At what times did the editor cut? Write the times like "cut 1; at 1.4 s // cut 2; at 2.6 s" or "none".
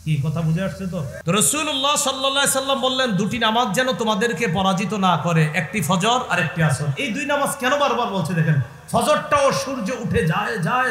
cut 1; at 1.1 s

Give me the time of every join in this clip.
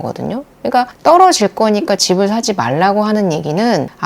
cut 1; at 0.9 s

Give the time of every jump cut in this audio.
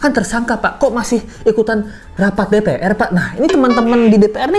none

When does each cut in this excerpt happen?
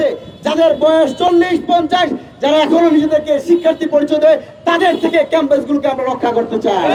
none

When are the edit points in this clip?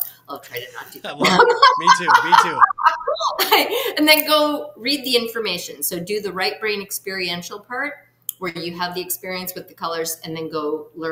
none

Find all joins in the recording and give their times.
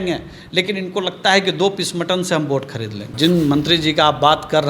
cut 1; at 3.1 s

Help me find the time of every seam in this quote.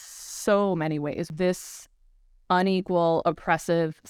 cut 1; at 1.3 s

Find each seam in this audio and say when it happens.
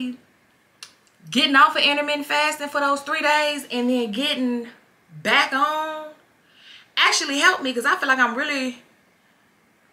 none

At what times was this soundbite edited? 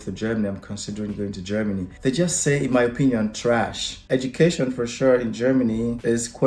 cut 1; at 4.0 s

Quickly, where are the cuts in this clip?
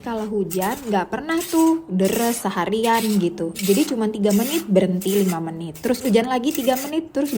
none

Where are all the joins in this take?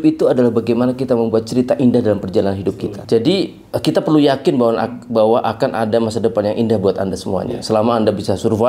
cut 1; at 2.9 s

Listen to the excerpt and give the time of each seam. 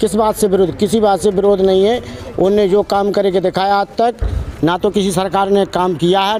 none

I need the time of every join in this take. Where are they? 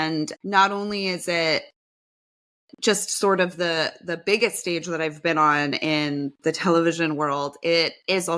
none

